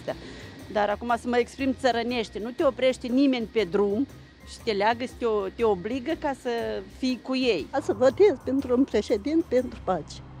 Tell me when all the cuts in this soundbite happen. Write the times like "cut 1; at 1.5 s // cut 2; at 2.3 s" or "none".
cut 1; at 7.7 s

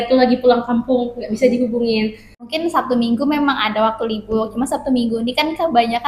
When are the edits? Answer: cut 1; at 2.5 s

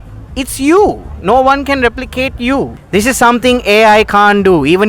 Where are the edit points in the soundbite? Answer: cut 1; at 2.8 s

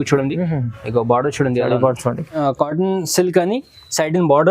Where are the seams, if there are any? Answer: cut 1; at 2.4 s

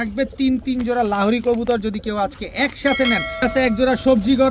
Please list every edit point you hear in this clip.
cut 1; at 3.4 s

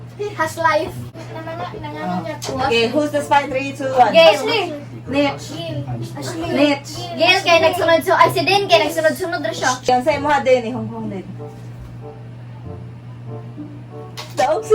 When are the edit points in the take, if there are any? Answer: cut 1; at 1.1 s

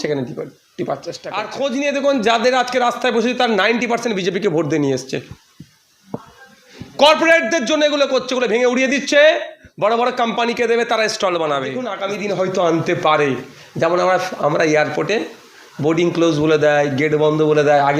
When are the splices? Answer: cut 1; at 1.5 s // cut 2; at 12.0 s

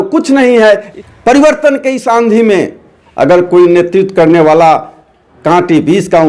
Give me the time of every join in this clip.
cut 1; at 1.0 s

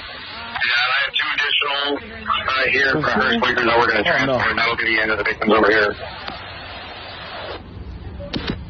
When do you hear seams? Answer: cut 1; at 1.8 s

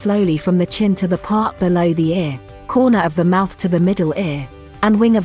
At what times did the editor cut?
none

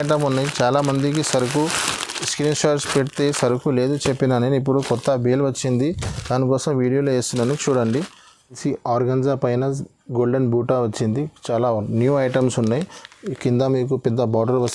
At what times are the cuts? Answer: cut 1; at 8.6 s

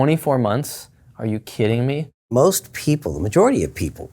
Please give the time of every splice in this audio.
cut 1; at 2.3 s

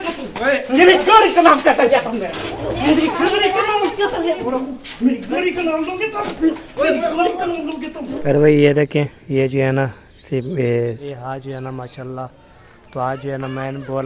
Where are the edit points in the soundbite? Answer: cut 1; at 4.4 s // cut 2; at 8.1 s // cut 3; at 11.1 s

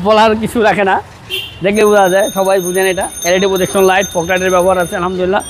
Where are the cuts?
none

